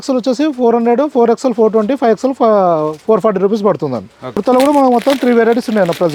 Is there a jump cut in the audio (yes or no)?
yes